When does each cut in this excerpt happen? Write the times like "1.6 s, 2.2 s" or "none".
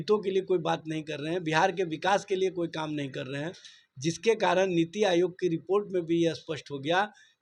none